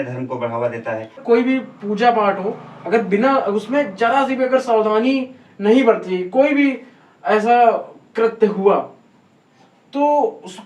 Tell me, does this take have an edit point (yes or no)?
yes